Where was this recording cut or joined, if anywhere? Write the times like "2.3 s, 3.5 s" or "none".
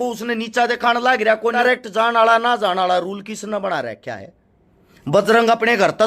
1.6 s